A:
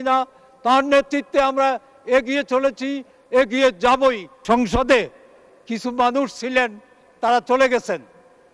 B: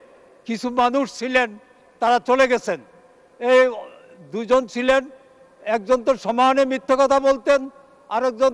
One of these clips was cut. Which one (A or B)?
A